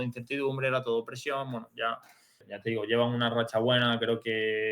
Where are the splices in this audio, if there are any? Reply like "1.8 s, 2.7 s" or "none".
2.5 s